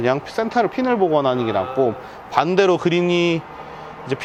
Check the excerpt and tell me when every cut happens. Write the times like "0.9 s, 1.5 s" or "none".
none